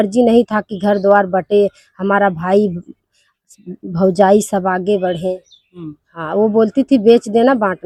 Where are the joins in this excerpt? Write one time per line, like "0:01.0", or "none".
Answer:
none

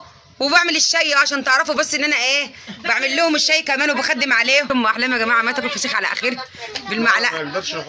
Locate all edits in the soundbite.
0:04.7

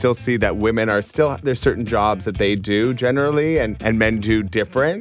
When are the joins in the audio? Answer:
0:03.8

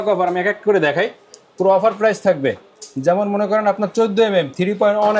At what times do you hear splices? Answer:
none

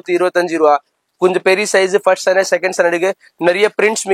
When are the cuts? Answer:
none

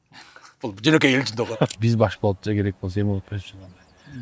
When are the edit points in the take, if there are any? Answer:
0:01.7

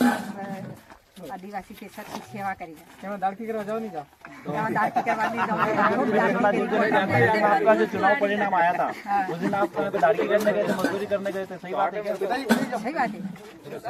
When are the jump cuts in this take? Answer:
none

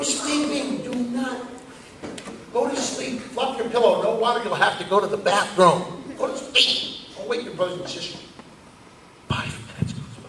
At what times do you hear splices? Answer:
none

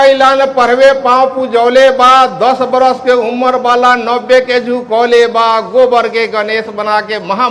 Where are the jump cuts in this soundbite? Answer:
none

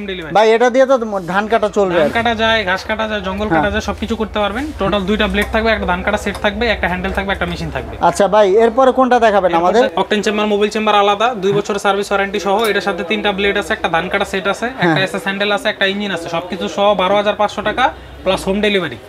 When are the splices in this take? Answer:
none

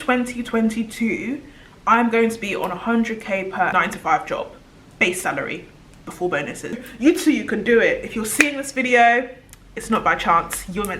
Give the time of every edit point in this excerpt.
0:03.7
0:06.8

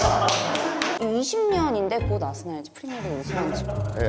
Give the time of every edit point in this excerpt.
0:01.0

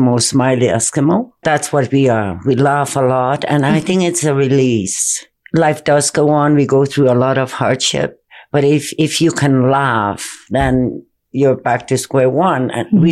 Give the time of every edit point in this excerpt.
0:01.4

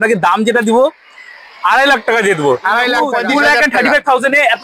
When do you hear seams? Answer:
0:03.2

